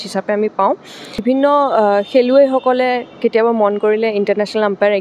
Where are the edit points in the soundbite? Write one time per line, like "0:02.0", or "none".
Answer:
none